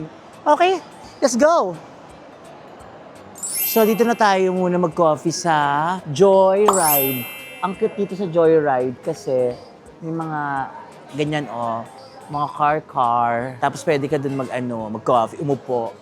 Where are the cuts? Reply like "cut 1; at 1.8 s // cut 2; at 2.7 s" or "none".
cut 1; at 3.4 s